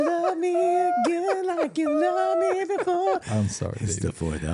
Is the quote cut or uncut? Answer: cut